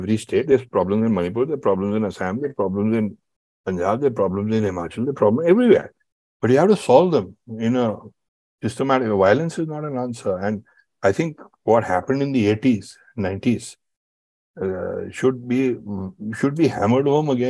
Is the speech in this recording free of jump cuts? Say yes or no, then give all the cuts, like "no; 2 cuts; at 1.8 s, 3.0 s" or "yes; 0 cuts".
yes; 0 cuts